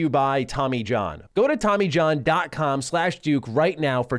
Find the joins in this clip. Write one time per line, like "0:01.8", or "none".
0:01.2